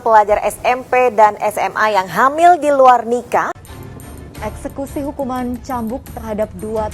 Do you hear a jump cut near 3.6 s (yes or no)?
yes